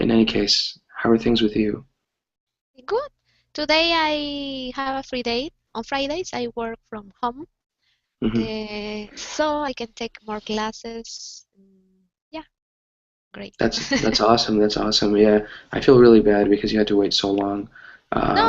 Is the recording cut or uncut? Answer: cut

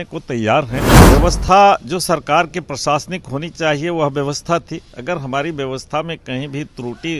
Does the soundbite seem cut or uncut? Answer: cut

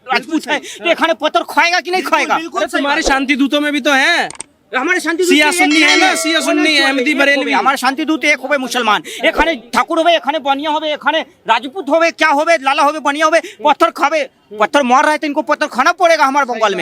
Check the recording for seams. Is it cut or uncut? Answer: uncut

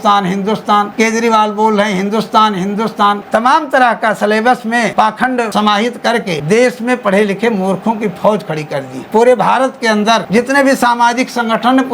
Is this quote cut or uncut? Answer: cut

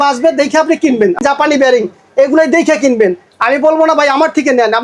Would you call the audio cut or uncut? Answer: cut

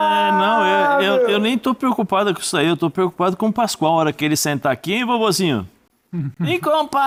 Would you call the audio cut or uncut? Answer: uncut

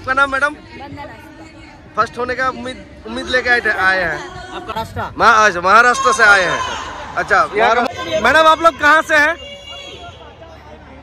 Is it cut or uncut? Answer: cut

